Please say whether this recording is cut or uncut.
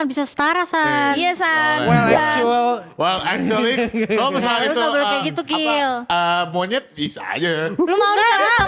uncut